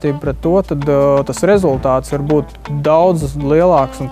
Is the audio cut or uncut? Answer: cut